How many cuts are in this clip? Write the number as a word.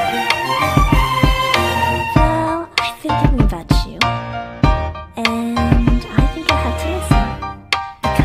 zero